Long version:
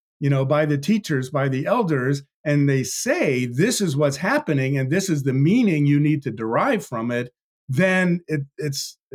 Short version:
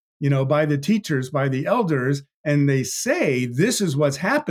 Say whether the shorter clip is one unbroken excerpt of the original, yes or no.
yes